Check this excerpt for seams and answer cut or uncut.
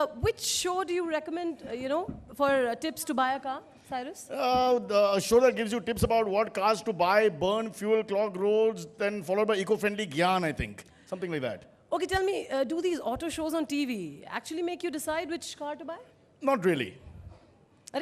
uncut